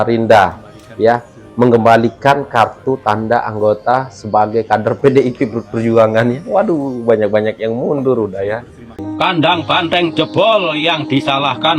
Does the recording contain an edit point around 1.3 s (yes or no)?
no